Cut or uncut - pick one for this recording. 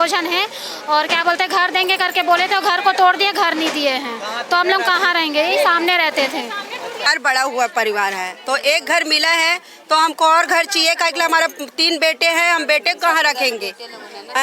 cut